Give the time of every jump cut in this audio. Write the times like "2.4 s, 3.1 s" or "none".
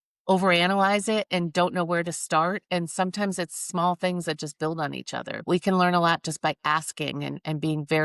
5.4 s